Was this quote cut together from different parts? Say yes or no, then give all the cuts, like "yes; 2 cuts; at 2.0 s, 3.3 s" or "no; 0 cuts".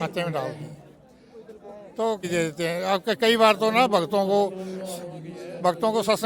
yes; 1 cut; at 2.3 s